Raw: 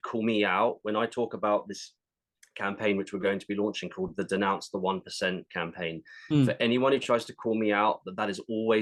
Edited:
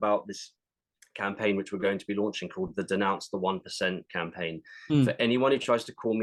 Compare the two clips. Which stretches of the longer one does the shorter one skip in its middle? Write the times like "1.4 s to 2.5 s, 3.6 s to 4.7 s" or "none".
none